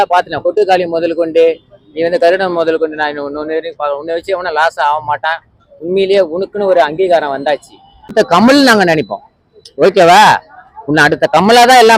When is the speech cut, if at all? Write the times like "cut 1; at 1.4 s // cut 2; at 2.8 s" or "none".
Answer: cut 1; at 8.1 s